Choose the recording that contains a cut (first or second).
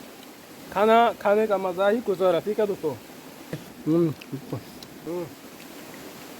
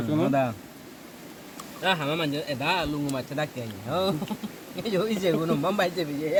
first